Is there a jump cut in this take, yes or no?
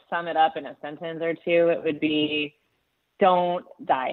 no